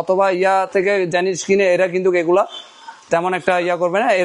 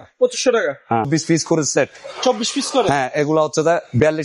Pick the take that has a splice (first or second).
second